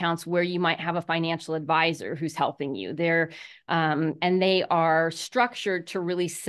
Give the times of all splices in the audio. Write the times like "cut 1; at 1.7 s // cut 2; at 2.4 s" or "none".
none